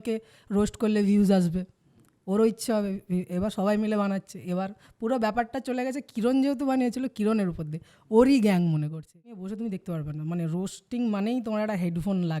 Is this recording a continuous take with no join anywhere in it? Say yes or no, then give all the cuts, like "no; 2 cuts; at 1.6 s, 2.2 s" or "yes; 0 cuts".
no; 1 cut; at 9.3 s